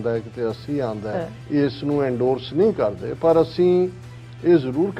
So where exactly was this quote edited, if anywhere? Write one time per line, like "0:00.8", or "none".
0:01.3